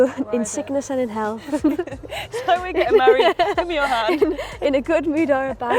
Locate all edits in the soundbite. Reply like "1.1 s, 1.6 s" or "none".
none